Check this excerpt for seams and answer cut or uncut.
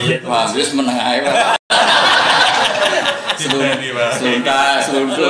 uncut